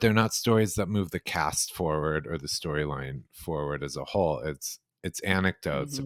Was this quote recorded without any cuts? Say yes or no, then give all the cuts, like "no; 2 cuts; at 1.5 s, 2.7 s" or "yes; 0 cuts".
yes; 0 cuts